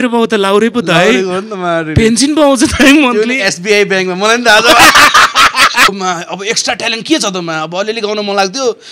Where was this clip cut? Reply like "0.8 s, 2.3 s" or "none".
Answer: 5.9 s